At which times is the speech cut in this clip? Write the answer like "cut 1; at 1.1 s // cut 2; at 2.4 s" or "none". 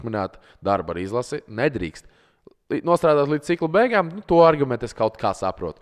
none